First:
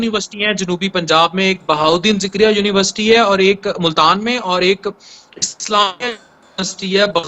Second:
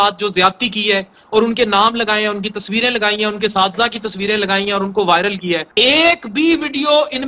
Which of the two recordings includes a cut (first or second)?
second